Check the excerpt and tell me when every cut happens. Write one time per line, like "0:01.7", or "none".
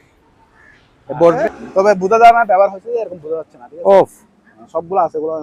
0:01.4